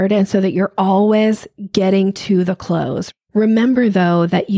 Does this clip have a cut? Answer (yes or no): yes